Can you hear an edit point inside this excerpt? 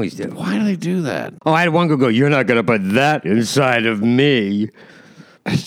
yes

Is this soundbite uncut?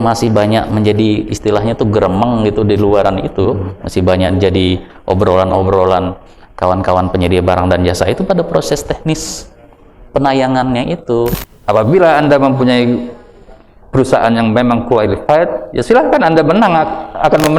no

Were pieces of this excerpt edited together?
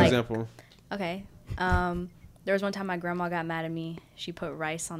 no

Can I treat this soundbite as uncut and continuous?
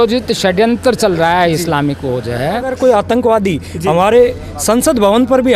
no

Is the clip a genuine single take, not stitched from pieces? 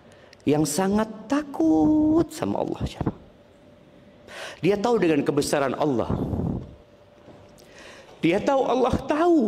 yes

